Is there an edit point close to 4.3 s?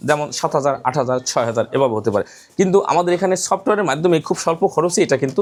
no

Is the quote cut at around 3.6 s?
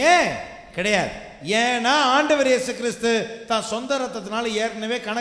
no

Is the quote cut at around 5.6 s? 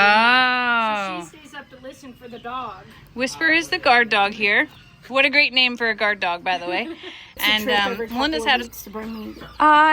no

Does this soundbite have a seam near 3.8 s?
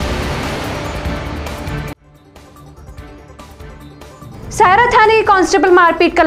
yes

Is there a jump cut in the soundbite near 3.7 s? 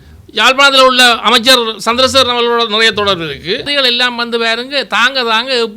yes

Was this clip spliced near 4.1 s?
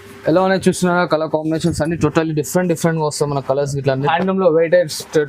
yes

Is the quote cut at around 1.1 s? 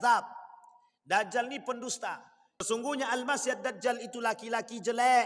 no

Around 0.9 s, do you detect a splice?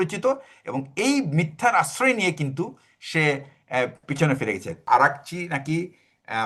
no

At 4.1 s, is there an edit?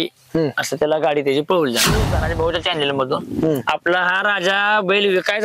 no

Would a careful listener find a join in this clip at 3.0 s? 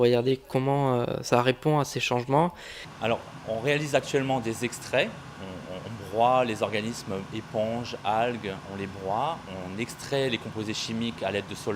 no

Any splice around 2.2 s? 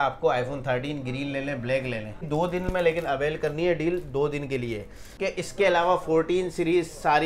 yes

